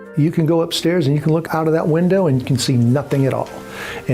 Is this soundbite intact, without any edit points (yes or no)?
no